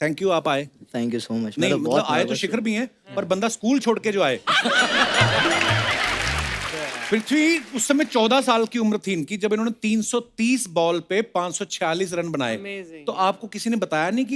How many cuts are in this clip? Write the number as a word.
one